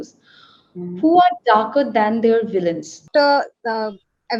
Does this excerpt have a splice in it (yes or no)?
yes